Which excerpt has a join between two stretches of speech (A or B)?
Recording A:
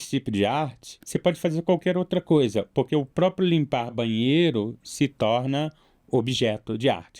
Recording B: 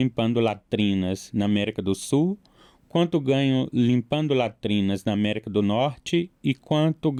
A